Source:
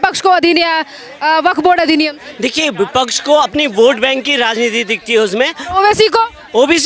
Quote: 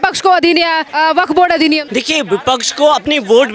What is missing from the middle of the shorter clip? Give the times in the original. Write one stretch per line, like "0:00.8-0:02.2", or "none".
0:00.9-0:01.1
0:02.2-0:02.4